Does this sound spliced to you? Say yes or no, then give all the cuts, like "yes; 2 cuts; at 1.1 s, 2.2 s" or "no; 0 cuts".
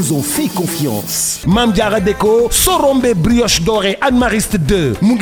no; 0 cuts